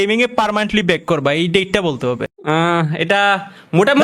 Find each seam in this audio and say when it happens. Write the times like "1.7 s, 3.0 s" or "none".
2.3 s